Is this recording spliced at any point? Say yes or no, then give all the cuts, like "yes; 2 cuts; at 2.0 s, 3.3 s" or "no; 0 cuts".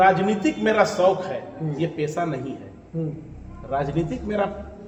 no; 0 cuts